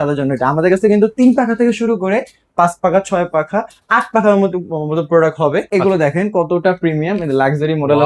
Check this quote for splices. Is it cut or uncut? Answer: cut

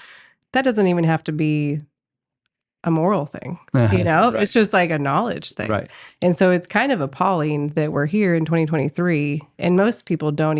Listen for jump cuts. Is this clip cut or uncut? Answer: uncut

